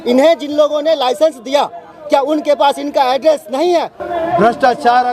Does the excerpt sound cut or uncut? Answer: cut